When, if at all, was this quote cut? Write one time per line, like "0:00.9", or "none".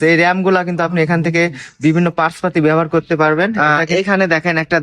0:03.6